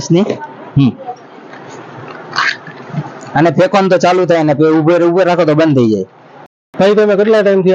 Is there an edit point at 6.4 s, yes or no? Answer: yes